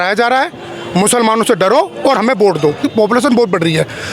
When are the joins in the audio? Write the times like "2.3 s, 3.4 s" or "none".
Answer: 2.9 s